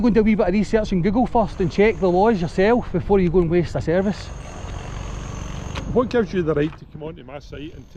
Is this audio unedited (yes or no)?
yes